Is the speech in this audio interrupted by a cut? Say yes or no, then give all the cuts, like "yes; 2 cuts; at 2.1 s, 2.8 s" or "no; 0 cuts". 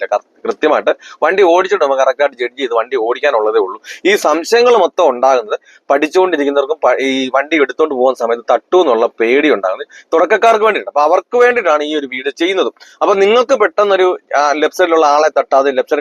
no; 0 cuts